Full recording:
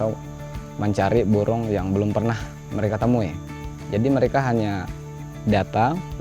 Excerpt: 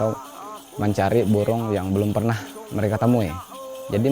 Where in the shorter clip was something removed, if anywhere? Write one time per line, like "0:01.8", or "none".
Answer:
none